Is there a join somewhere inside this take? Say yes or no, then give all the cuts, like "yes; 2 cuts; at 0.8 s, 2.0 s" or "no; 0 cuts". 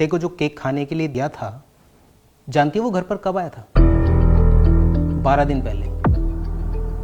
yes; 1 cut; at 1.1 s